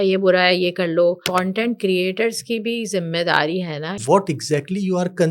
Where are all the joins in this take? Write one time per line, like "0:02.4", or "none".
0:01.2
0:04.0

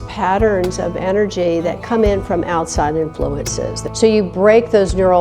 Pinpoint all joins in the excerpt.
0:03.9

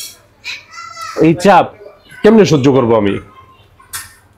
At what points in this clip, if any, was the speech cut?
none

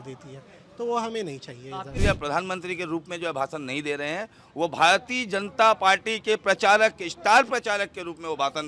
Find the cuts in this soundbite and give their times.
0:01.9

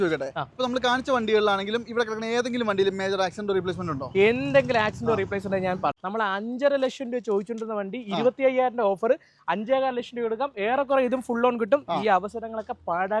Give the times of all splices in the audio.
0:05.9

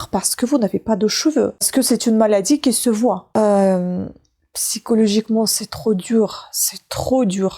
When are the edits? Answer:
0:03.3

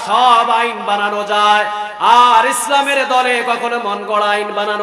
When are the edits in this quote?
none

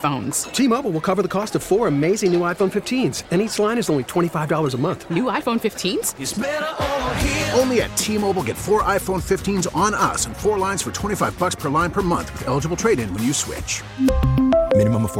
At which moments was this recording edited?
none

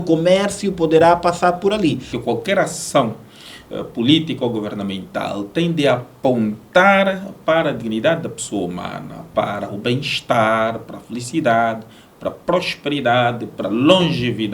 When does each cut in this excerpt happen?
0:02.1

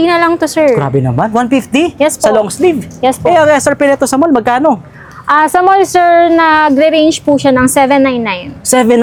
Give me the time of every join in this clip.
none

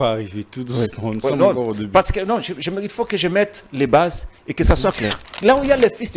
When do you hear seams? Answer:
0:05.3

